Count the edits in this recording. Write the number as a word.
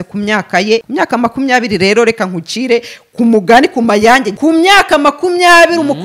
two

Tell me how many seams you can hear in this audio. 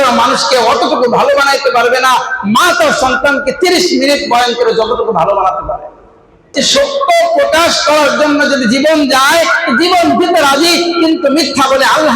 one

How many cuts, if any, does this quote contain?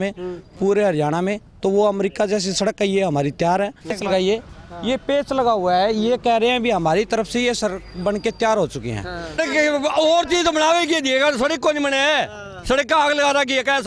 two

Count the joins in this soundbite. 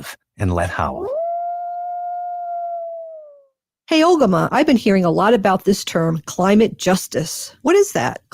one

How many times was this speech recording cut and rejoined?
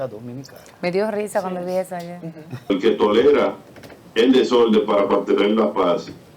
one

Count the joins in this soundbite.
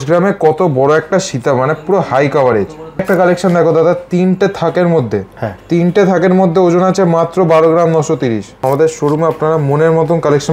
two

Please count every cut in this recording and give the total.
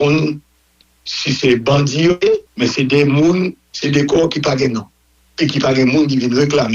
one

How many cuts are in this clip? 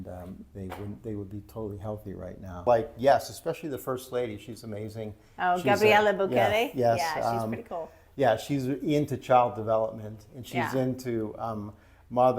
one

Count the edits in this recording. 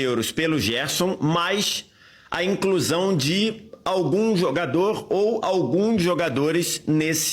zero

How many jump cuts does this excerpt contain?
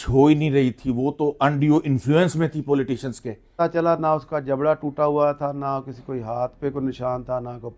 one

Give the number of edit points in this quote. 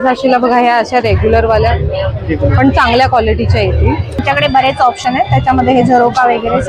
one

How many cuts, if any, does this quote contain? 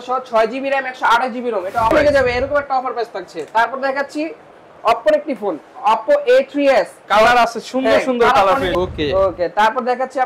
two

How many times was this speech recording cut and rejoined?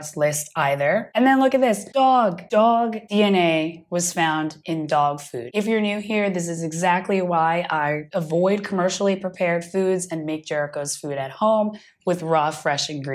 zero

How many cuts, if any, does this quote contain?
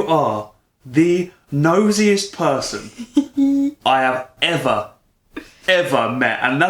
zero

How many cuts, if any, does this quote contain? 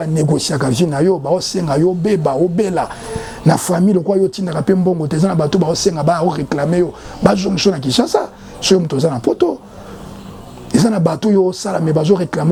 zero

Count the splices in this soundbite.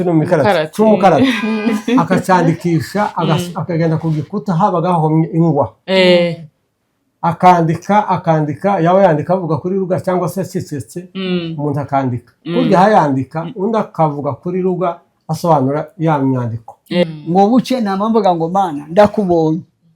one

